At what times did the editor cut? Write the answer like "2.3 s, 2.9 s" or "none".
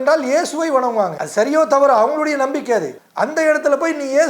1.2 s, 3.0 s